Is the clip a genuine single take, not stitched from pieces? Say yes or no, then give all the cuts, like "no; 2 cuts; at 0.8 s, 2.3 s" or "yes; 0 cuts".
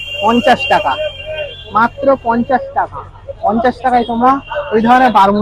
yes; 0 cuts